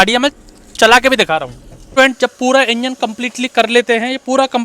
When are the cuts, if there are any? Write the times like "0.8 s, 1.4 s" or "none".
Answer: 1.9 s